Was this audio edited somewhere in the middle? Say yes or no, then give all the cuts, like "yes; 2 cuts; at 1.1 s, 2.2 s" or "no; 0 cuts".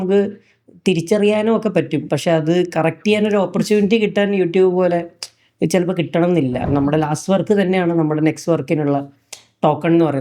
yes; 2 cuts; at 2.1 s, 6.6 s